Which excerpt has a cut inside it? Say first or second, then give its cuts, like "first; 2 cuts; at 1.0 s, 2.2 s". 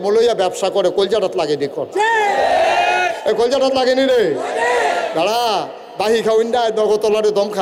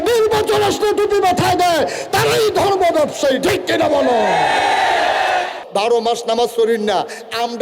second; 1 cut; at 5.6 s